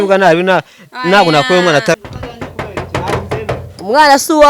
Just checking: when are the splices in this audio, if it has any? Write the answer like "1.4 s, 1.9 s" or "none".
2.0 s